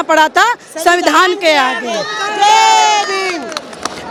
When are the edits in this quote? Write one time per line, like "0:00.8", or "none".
none